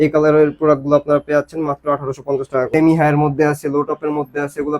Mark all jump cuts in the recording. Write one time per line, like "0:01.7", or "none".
0:02.7